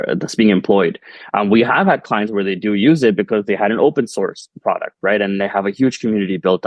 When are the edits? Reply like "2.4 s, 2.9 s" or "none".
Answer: none